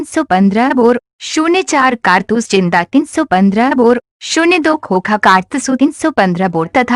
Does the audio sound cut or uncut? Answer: uncut